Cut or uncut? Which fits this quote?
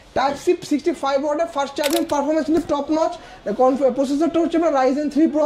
cut